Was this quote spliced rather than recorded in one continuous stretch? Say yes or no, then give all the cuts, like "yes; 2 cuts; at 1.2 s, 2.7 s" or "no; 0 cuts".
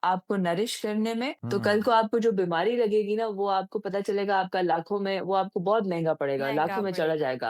yes; 1 cut; at 1.4 s